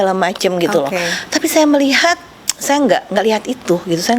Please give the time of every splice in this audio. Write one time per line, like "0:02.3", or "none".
none